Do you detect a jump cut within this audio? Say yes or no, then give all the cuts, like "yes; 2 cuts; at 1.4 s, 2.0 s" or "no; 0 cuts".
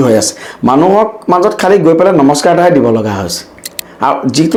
no; 0 cuts